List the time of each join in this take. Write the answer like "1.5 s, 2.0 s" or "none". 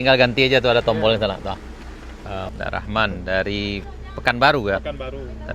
2.5 s